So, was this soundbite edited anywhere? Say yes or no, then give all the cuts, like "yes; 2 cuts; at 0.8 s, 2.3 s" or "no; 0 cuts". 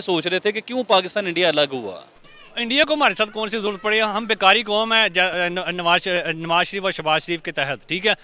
yes; 1 cut; at 2.2 s